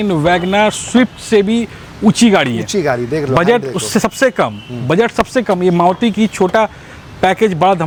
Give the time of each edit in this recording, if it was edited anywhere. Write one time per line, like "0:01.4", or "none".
none

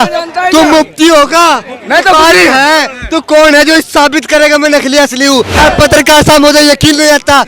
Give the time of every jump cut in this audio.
0:05.6

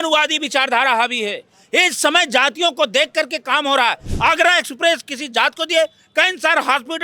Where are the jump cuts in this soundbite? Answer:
0:04.1

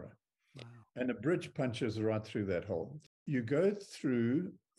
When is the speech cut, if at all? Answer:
0:03.2

